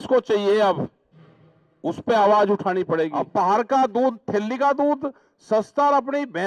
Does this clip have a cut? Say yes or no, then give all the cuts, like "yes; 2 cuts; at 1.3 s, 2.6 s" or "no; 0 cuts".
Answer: yes; 1 cut; at 3.2 s